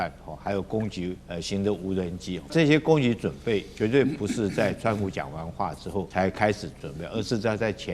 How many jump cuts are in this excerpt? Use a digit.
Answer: 4